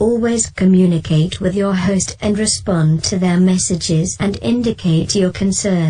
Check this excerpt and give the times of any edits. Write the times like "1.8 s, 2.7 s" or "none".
none